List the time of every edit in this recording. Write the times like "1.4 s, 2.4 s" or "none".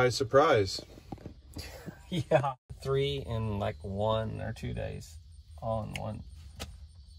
2.7 s